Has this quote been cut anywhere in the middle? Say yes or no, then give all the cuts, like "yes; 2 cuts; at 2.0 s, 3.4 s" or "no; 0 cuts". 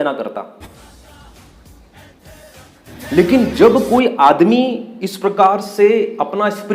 yes; 1 cut; at 2.9 s